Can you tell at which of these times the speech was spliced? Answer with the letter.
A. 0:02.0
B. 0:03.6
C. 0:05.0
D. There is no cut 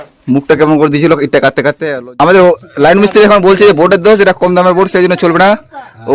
A